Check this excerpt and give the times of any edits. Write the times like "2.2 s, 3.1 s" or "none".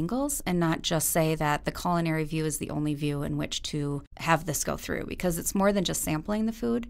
4.1 s